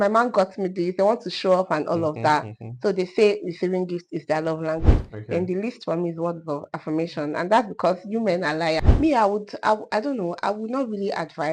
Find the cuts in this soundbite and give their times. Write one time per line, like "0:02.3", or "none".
0:05.1
0:08.9